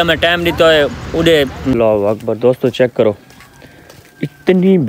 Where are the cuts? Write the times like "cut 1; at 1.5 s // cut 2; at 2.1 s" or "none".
cut 1; at 1.7 s